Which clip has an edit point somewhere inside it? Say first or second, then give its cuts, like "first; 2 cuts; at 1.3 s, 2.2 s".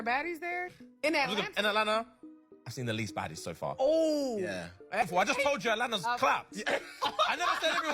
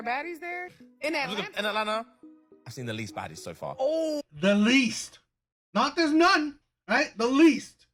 first; 1 cut; at 4.2 s